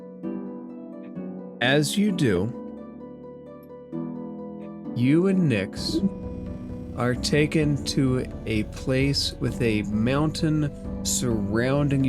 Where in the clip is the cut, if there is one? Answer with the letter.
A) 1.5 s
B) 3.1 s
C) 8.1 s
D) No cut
A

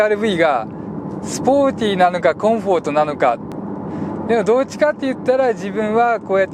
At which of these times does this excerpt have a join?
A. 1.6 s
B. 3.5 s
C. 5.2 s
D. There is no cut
B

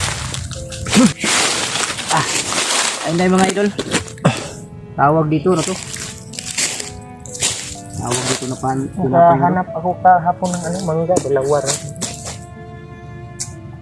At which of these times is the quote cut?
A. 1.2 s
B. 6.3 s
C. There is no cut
A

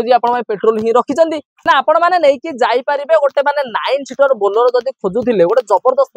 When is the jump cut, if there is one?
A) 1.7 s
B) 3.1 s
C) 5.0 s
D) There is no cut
A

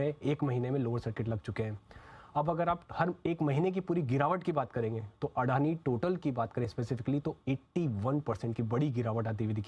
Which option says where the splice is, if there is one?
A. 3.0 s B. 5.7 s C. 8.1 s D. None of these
D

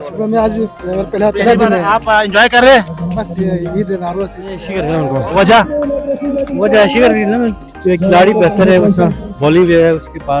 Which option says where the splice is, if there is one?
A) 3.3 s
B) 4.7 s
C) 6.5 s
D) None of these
B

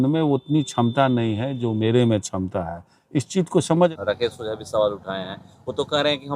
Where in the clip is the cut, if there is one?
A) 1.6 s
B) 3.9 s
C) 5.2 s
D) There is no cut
B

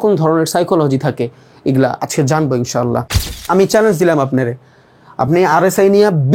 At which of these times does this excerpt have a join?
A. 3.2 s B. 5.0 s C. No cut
A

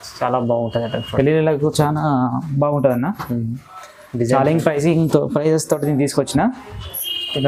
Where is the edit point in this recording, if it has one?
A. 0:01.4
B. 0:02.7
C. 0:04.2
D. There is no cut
D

